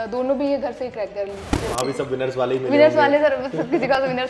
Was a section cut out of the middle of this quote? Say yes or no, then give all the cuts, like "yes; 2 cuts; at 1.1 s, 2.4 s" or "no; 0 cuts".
yes; 1 cut; at 1.5 s